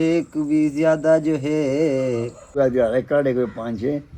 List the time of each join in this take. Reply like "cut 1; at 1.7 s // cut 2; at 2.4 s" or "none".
cut 1; at 2.5 s